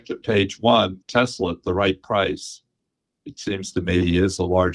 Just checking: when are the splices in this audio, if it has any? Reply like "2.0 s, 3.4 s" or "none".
1.0 s